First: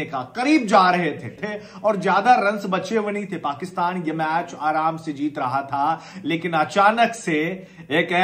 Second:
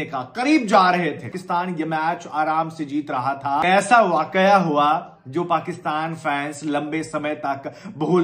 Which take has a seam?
second; 2 cuts; at 1.3 s, 3.6 s

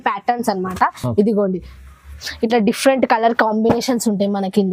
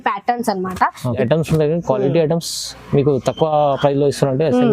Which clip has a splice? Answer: second; 1 cut; at 1.1 s

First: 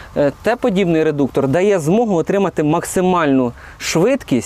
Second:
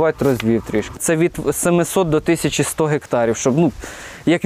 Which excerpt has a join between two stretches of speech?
second; 1 cut; at 1.0 s

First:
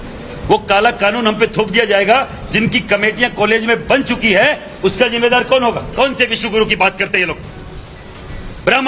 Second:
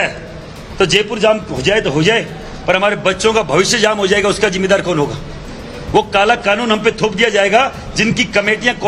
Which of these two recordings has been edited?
first; 1 cut; at 5.9 s

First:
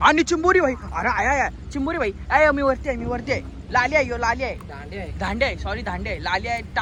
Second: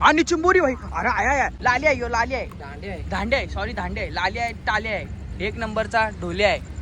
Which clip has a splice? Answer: second; 1 cut; at 1.5 s

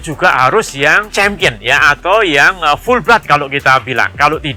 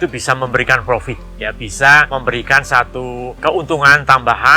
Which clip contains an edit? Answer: second; 2 cuts; at 2.1 s, 3.3 s

